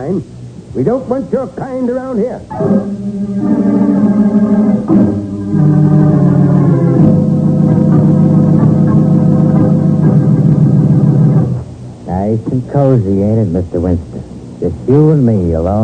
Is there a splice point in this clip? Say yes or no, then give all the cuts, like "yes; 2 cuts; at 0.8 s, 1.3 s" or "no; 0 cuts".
no; 0 cuts